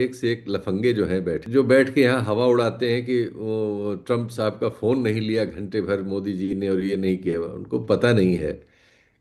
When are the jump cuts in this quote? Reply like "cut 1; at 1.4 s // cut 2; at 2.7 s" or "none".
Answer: cut 1; at 1.4 s